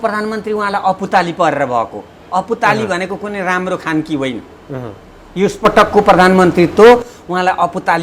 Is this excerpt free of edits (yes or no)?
yes